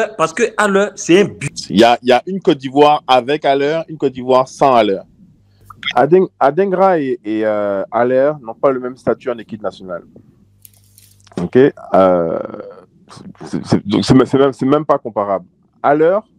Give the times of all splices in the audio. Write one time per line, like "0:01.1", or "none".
0:01.5
0:05.8